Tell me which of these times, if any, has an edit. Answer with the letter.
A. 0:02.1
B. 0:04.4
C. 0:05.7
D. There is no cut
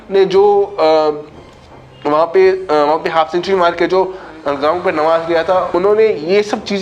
C